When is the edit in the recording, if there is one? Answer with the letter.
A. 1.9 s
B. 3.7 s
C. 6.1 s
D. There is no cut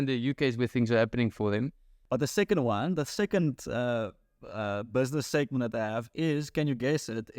A